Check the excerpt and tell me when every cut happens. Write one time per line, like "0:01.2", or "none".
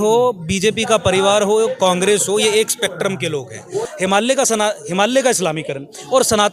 0:03.9